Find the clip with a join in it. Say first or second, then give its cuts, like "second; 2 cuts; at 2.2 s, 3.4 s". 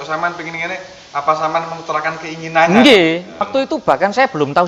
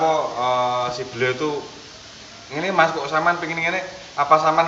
first; 1 cut; at 3.5 s